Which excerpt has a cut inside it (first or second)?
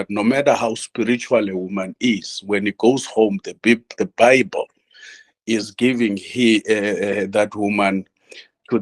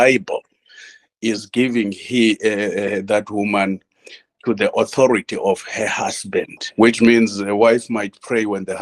second